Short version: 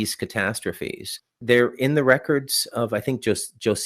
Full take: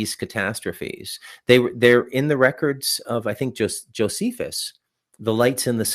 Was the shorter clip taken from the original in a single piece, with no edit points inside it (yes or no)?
no